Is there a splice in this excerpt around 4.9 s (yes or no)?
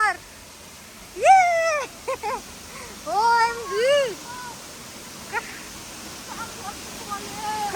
no